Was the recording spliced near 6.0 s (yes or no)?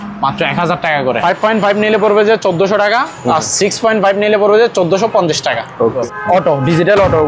yes